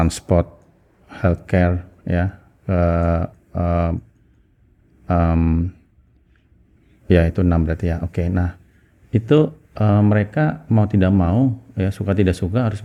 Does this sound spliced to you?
no; 0 cuts

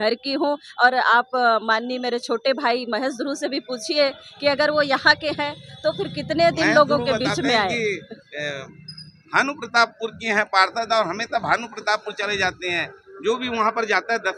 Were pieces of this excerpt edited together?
no; 0 cuts

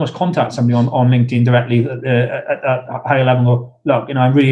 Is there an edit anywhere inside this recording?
no; 0 cuts

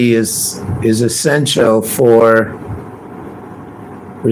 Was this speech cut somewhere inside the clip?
no; 0 cuts

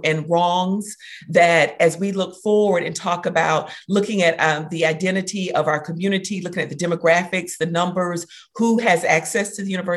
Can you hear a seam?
no; 0 cuts

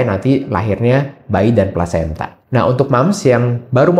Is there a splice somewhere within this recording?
no; 0 cuts

